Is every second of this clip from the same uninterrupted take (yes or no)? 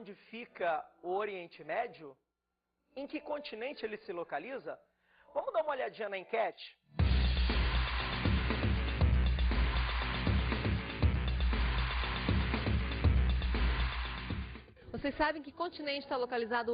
yes